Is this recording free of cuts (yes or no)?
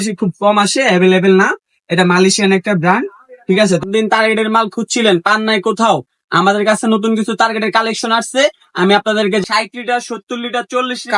no